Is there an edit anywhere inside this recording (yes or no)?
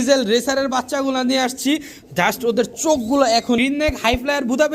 yes